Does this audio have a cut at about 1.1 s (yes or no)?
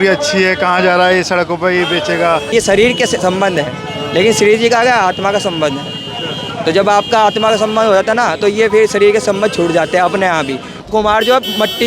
no